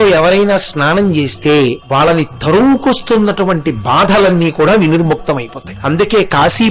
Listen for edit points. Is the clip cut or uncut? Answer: cut